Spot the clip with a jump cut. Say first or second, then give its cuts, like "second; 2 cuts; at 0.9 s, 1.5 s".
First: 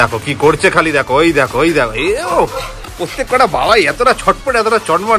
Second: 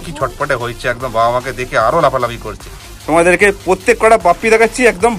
second; 1 cut; at 2.9 s